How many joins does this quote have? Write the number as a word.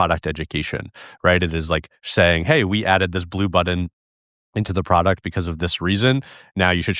zero